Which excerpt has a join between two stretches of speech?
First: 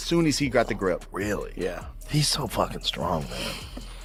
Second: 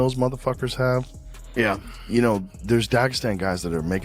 second; 1 cut; at 2.5 s

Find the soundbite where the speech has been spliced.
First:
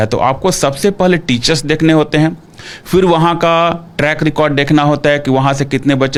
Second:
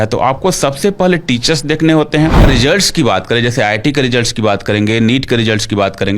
second; 1 cut; at 2.4 s

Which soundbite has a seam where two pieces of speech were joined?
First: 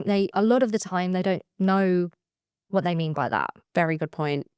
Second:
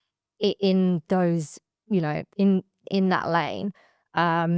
first; 1 cut; at 3.6 s

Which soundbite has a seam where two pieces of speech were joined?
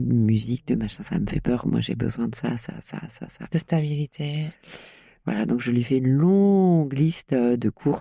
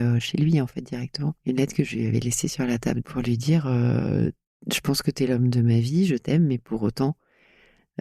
second; 2 cuts; at 1.4 s, 3.0 s

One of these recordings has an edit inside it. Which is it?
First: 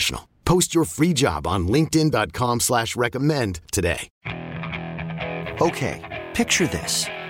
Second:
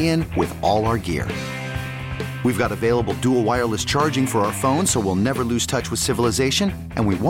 first; 1 cut; at 4.1 s

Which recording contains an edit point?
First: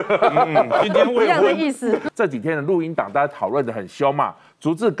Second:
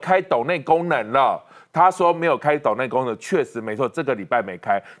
first; 1 cut; at 2.0 s

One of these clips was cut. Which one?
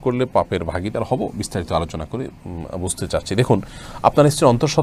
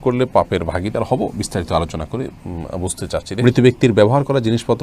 second; 1 cut; at 3.2 s

